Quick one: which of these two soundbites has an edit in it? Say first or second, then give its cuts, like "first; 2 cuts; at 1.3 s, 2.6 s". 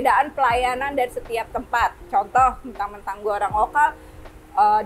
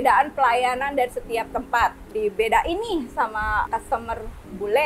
second; 2 cuts; at 2.1 s, 3.7 s